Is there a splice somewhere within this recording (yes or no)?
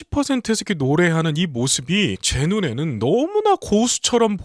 yes